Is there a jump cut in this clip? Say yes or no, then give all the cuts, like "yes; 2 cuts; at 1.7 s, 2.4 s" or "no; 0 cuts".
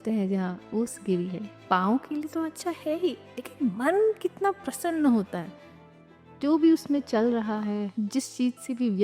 yes; 2 cuts; at 1.6 s, 7.9 s